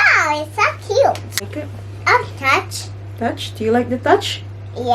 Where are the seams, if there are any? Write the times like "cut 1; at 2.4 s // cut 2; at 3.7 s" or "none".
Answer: cut 1; at 1.4 s